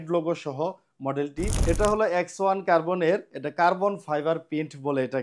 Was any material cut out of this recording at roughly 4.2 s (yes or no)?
no